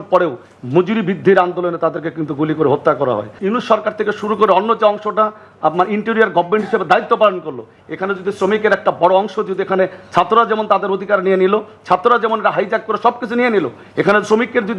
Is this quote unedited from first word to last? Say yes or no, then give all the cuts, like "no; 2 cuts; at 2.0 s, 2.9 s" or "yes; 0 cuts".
no; 1 cut; at 3.3 s